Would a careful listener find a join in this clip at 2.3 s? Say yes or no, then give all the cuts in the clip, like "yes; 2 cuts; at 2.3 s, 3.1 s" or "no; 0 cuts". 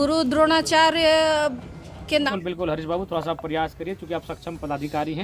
yes; 1 cut; at 2.3 s